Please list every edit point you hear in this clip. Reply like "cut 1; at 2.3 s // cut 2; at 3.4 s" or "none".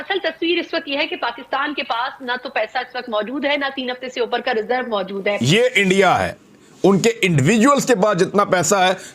cut 1; at 5.4 s